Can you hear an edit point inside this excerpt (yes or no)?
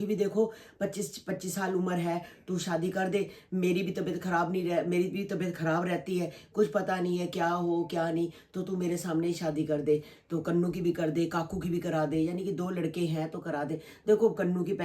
no